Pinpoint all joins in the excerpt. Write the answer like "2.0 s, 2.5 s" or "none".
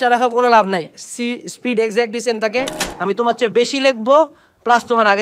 2.8 s